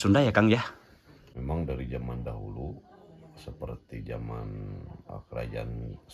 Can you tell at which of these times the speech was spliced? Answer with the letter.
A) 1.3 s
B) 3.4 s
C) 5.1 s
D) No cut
A